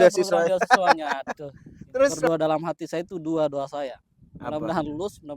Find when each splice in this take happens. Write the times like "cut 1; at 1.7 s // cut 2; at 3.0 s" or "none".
cut 1; at 2.3 s